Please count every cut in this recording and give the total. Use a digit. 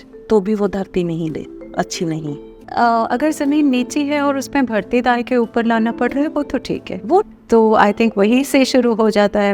2